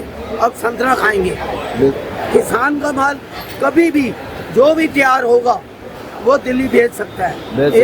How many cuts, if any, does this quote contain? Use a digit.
1